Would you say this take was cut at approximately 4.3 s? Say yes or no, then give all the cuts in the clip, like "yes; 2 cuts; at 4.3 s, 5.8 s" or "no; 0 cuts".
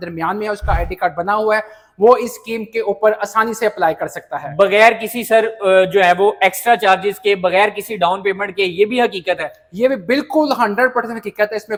no; 0 cuts